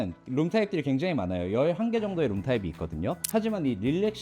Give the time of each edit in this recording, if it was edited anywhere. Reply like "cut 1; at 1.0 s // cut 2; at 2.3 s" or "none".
cut 1; at 3.2 s

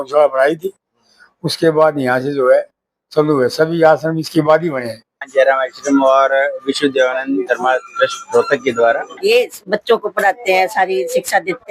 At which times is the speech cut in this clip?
cut 1; at 5.2 s // cut 2; at 9.1 s

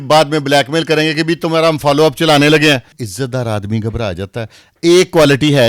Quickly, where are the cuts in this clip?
cut 1; at 3.0 s

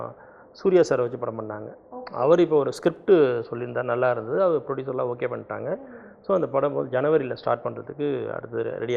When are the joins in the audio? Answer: none

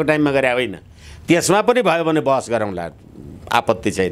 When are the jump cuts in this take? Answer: none

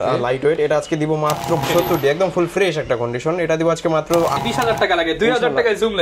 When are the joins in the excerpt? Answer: cut 1; at 1.6 s // cut 2; at 4.4 s

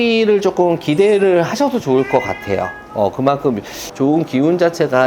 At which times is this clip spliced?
cut 1; at 3.8 s

